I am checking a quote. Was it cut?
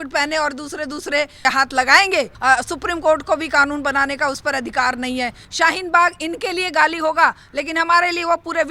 yes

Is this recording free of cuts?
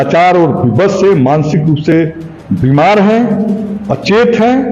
yes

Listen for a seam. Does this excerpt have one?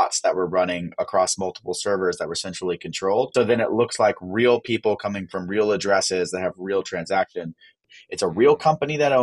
yes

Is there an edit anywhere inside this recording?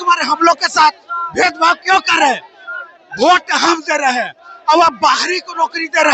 no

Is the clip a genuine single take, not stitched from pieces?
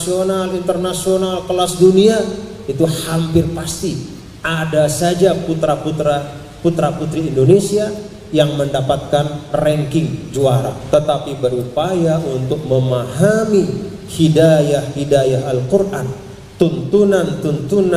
no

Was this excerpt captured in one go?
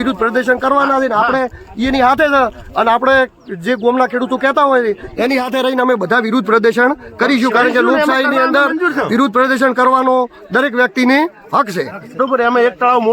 no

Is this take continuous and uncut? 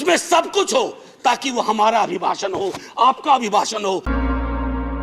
no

